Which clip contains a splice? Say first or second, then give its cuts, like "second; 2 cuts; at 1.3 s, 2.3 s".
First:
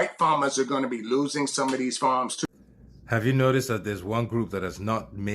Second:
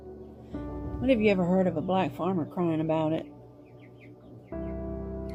first; 1 cut; at 2.4 s